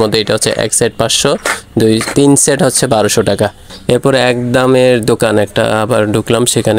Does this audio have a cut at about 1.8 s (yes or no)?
no